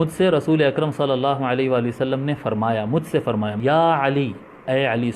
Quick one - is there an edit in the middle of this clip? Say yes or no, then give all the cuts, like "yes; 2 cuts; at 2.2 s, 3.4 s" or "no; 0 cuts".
yes; 1 cut; at 3.5 s